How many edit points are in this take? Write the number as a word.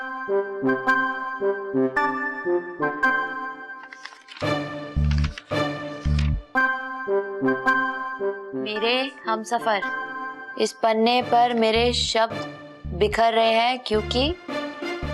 zero